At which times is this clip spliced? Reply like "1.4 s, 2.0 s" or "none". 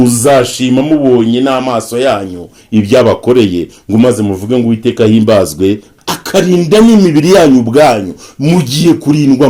5.9 s